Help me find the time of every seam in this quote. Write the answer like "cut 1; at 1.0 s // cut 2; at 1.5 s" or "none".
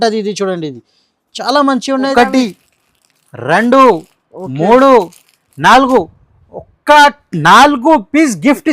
cut 1; at 2.1 s